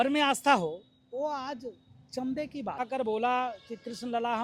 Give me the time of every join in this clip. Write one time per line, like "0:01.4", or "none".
0:02.8

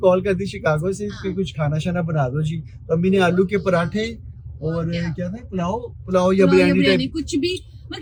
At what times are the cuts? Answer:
none

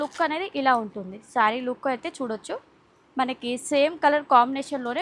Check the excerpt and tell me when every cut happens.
none

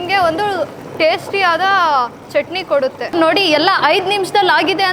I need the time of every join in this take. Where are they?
0:03.1

